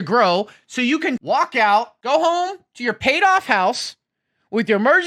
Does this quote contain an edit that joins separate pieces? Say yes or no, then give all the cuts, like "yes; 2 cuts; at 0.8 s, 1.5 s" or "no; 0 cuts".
yes; 2 cuts; at 1.2 s, 1.9 s